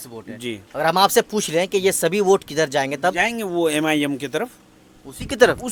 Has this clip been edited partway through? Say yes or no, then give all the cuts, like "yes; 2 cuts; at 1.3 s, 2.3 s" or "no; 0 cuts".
no; 0 cuts